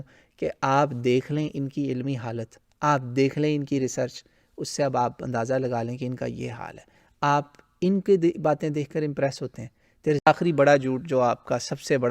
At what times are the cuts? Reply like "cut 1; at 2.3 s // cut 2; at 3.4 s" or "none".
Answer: cut 1; at 10.3 s